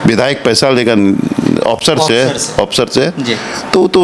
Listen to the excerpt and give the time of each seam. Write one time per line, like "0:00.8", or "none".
none